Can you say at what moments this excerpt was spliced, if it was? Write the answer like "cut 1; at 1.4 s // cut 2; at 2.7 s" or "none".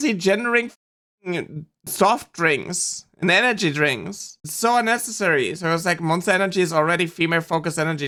none